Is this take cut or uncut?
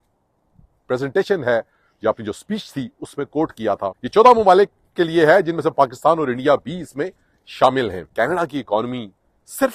cut